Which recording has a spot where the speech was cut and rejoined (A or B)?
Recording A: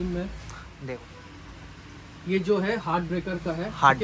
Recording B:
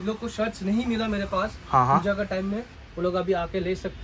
A